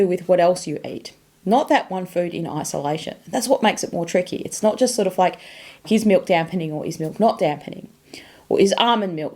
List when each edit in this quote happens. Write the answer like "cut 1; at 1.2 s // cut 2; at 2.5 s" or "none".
cut 1; at 5.8 s